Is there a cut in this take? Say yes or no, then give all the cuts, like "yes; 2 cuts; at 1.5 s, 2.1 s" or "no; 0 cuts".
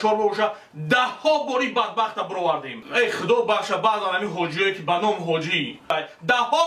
yes; 2 cuts; at 2.8 s, 5.8 s